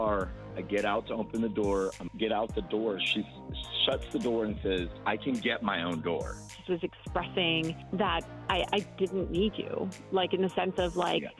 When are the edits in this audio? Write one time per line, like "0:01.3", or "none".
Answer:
0:06.6